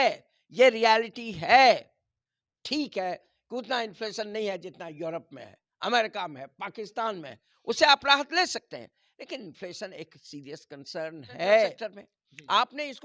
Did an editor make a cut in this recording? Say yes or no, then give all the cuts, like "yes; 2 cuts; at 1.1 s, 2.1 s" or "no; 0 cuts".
yes; 1 cut; at 11.8 s